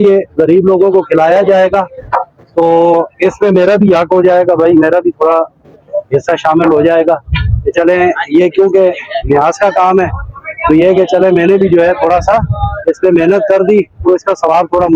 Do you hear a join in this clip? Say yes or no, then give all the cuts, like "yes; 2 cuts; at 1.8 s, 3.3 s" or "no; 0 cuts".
no; 0 cuts